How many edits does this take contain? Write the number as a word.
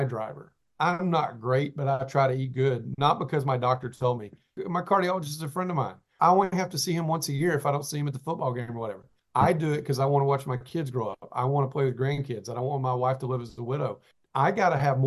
two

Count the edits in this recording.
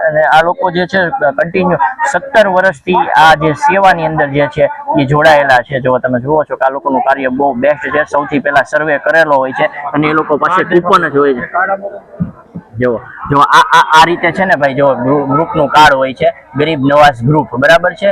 zero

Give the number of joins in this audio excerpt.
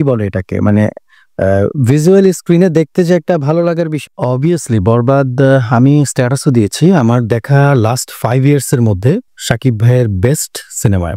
one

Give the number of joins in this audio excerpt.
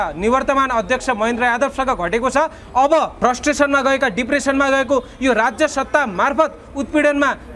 one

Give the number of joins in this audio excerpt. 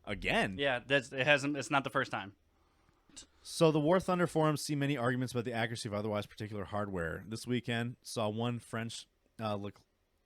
one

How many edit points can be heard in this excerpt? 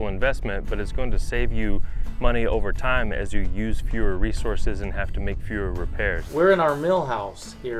one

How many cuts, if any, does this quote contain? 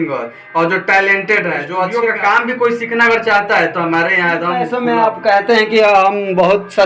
two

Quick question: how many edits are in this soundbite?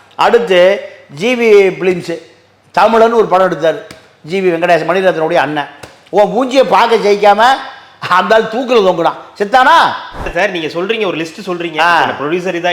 one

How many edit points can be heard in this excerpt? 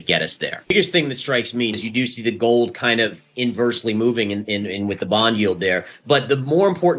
two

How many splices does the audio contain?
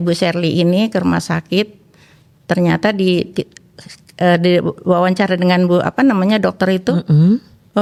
zero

